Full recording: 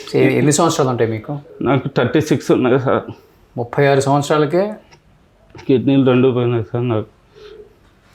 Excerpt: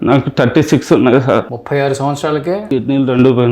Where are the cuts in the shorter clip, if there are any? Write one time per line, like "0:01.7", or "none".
0:01.6
0:02.6